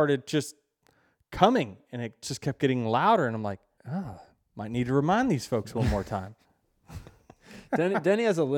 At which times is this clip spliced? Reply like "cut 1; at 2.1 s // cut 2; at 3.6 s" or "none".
cut 1; at 3.7 s